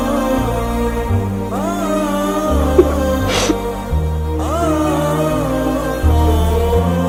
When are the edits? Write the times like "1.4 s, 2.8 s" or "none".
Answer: none